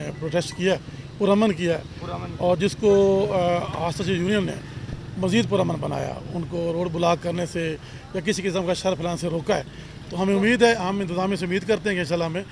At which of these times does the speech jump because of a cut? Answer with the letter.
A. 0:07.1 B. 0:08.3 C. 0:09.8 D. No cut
D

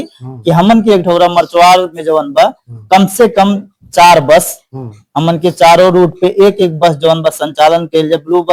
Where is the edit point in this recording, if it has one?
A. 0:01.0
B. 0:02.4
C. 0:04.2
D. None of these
D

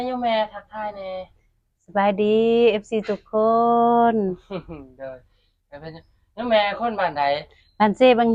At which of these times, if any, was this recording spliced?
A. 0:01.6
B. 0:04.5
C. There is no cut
C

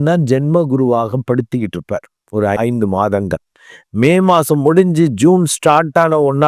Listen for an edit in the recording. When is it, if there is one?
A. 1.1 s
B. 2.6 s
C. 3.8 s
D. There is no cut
B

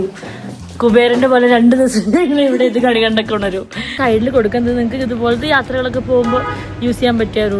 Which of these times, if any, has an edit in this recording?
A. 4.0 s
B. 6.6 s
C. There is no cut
A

